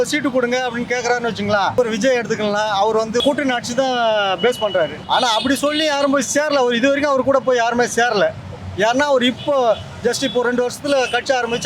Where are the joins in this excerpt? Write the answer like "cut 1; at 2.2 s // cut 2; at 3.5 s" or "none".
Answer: cut 1; at 1.7 s // cut 2; at 3.2 s // cut 3; at 5.0 s